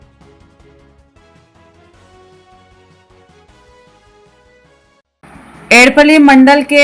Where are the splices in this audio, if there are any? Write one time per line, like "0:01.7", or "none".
none

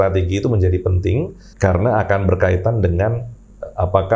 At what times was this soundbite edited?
0:01.4

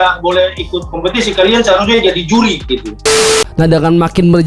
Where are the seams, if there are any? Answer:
0:03.2

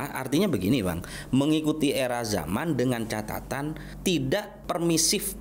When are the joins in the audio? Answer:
0:03.9
0:04.5

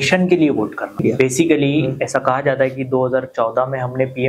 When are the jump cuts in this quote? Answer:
0:01.0

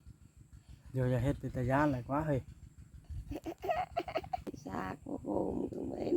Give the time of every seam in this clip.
0:04.6

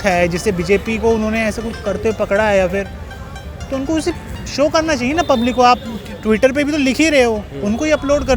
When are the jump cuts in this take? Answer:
none

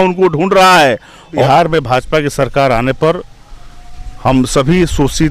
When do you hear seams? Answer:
0:01.4

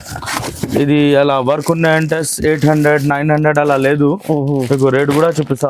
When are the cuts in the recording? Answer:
none

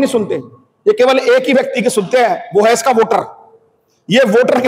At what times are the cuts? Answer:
none

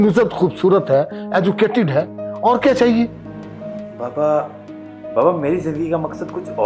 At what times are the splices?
none

